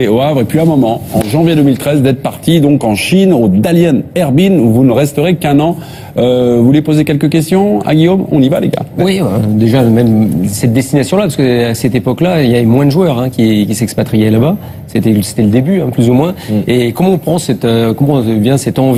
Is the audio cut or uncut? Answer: uncut